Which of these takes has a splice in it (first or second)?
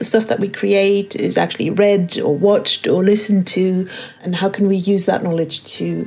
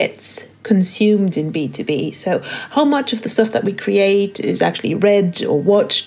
first